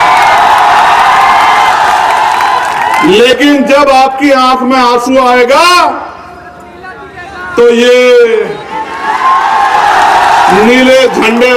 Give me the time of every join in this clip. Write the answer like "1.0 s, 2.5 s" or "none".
none

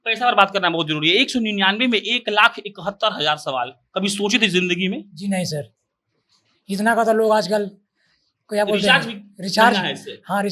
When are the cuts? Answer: none

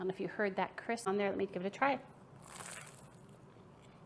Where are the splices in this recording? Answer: 1.1 s

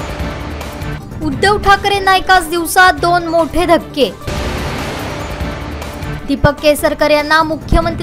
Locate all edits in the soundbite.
0.9 s

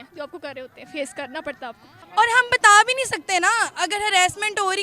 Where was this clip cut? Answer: 2.0 s

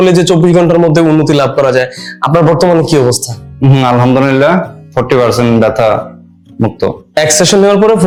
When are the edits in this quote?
none

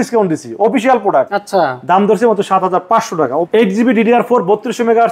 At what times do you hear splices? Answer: 1.4 s, 3.5 s

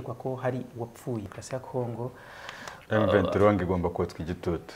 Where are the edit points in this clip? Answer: 1.2 s

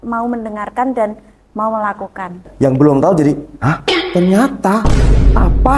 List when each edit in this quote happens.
2.5 s

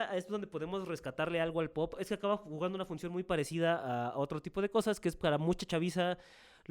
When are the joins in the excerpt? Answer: 2.0 s

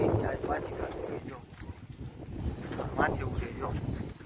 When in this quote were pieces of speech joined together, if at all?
none

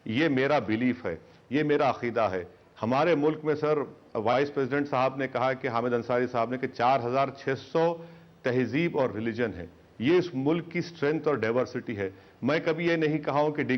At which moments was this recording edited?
5.7 s

